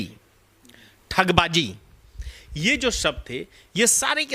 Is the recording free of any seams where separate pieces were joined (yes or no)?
yes